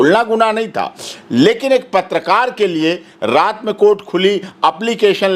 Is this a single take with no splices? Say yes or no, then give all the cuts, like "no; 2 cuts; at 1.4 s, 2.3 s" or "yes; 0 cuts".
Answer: yes; 0 cuts